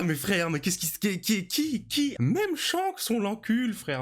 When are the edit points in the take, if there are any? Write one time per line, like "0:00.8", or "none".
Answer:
0:02.1